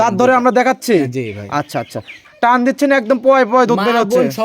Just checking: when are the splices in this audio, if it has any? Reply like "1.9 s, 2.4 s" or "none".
2.1 s